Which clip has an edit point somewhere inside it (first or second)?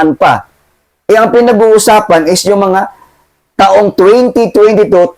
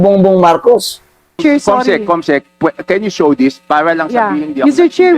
second